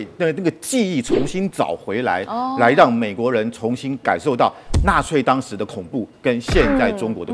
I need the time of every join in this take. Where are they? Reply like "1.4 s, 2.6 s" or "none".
none